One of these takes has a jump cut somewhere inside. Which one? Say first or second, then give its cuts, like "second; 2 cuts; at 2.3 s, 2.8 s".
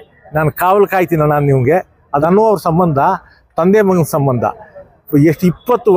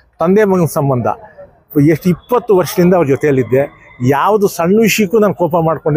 first; 1 cut; at 2.1 s